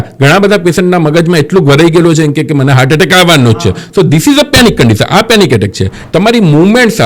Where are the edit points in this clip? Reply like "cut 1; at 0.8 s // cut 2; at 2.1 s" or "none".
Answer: cut 1; at 5.9 s